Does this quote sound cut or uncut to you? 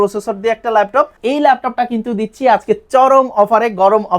cut